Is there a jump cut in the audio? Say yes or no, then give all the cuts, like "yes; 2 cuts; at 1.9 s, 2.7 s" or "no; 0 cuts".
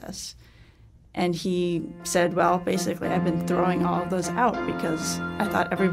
no; 0 cuts